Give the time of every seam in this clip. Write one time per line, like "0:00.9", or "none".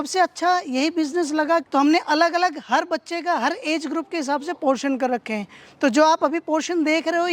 0:01.7